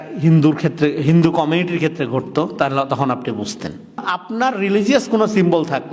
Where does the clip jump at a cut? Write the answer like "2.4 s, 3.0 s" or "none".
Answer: 4.2 s